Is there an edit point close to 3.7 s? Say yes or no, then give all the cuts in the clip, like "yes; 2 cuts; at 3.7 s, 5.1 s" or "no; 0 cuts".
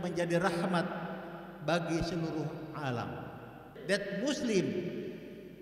yes; 1 cut; at 3.7 s